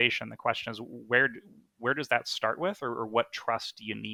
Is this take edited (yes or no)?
no